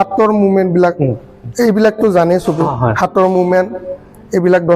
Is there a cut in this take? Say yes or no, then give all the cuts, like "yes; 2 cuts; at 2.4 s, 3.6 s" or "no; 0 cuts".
no; 0 cuts